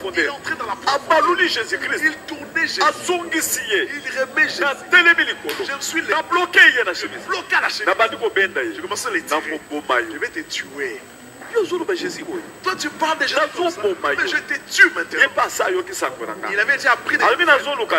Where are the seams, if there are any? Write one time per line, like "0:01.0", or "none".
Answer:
none